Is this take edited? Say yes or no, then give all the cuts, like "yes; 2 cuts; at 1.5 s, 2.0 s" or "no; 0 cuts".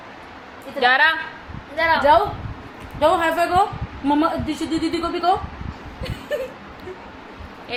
no; 0 cuts